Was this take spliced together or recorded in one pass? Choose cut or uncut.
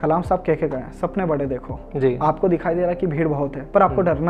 uncut